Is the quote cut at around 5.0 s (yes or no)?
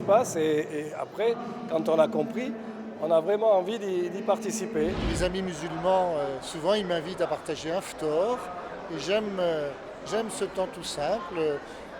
yes